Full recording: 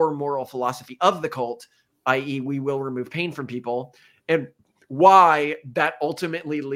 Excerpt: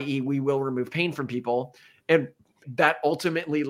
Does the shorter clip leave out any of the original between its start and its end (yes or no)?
yes